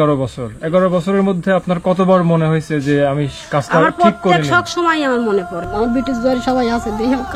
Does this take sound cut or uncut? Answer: cut